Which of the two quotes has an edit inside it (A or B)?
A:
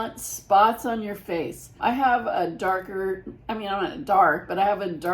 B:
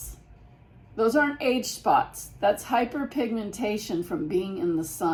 A